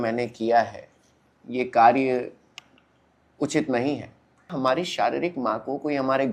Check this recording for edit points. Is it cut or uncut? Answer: cut